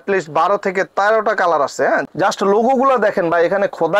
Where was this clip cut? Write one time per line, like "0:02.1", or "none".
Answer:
0:02.0

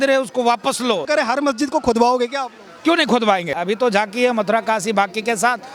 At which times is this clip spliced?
0:01.1
0:03.5

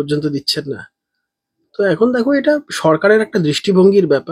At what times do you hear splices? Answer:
none

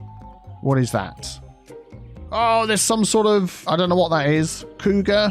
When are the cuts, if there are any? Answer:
0:03.6

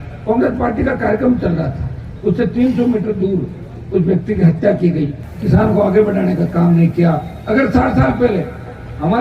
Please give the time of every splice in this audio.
0:05.3

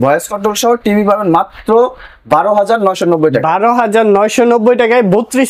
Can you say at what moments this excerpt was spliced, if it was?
none

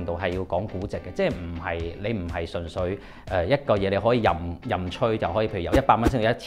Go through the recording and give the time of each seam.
none

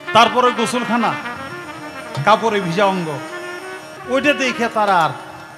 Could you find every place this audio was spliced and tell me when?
0:03.9

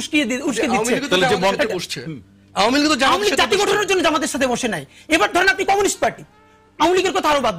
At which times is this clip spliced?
none

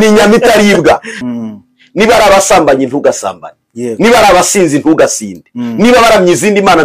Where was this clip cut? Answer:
0:01.1

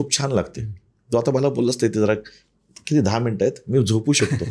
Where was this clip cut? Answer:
none

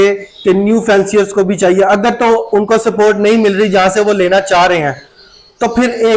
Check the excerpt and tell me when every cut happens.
none

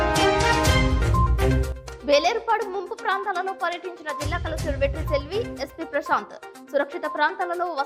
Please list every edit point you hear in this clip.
none

